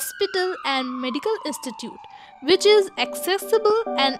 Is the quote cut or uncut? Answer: uncut